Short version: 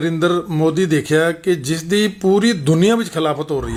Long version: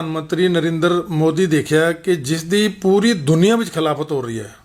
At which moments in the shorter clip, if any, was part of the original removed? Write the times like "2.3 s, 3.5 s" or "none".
none